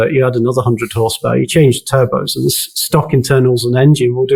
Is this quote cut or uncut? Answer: uncut